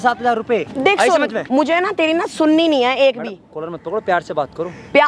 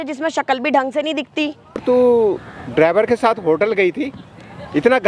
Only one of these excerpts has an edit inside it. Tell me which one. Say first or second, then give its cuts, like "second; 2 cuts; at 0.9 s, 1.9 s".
second; 1 cut; at 1.8 s